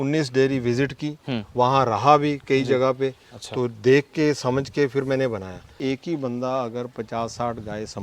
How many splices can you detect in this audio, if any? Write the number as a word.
one